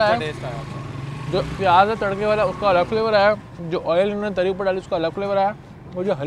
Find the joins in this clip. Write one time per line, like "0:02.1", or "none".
none